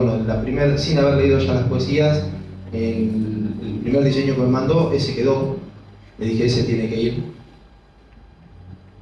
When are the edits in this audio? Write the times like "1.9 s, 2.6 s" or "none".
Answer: none